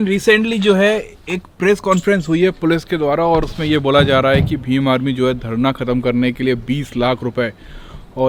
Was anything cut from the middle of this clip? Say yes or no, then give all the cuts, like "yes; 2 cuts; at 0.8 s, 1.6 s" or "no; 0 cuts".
no; 0 cuts